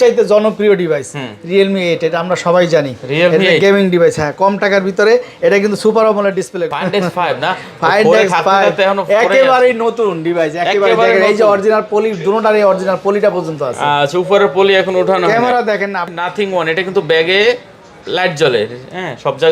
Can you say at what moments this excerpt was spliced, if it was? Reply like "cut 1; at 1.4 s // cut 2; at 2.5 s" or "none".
cut 1; at 6.6 s // cut 2; at 16.1 s